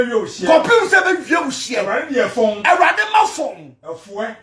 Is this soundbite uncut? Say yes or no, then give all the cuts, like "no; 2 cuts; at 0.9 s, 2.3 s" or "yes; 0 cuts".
yes; 0 cuts